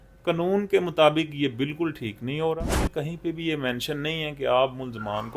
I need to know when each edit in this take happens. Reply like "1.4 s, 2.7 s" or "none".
2.7 s

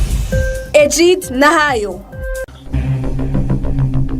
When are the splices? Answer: 2.6 s

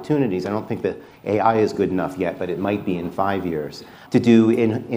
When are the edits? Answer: 4.0 s

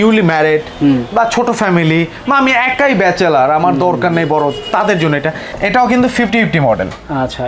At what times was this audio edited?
5.5 s

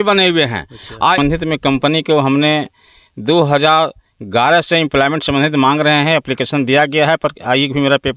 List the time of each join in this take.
1.2 s

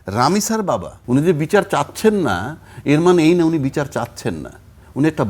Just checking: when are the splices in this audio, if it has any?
0.9 s

